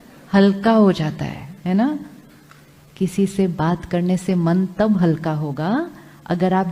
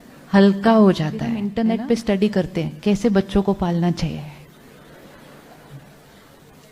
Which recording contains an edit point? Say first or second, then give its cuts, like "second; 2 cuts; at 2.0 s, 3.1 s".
second; 1 cut; at 1.5 s